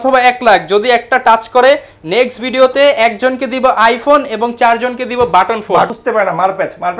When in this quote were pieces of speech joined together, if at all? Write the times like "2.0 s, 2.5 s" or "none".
5.9 s